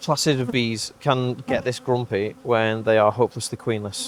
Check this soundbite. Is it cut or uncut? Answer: uncut